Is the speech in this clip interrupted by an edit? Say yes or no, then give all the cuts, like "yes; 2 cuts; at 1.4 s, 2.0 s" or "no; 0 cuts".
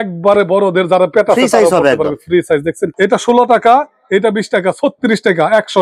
yes; 1 cut; at 2.9 s